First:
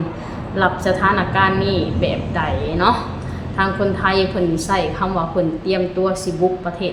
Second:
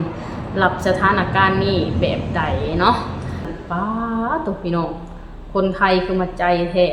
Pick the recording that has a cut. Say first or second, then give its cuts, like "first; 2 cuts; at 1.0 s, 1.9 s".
second; 1 cut; at 3.5 s